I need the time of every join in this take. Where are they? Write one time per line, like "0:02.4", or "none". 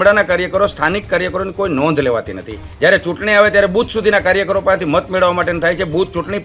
0:02.7

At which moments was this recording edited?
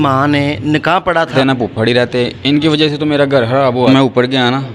0:01.3
0:03.9

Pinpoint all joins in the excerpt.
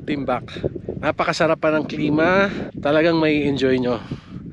0:00.9
0:02.6

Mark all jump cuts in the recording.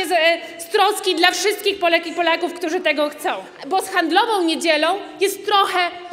0:03.5

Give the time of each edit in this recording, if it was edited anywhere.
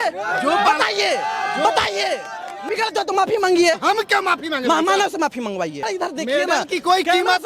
0:02.7
0:05.8

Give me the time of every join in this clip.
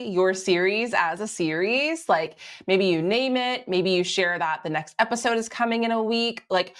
none

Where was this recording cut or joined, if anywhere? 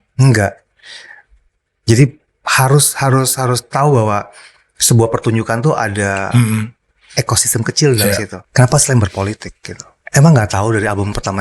0:08.4

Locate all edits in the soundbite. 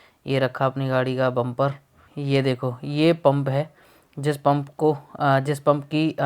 0:02.1

